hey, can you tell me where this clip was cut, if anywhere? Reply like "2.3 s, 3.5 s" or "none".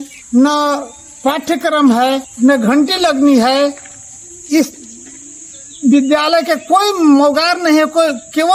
none